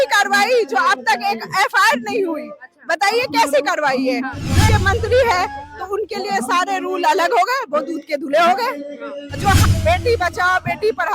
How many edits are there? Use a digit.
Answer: 2